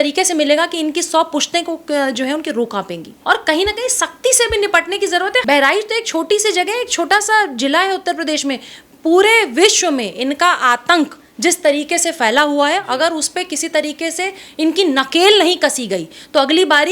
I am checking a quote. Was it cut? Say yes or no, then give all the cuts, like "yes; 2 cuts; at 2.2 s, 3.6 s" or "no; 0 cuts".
yes; 2 cuts; at 3.1 s, 5.4 s